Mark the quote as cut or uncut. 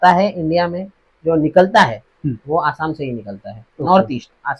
uncut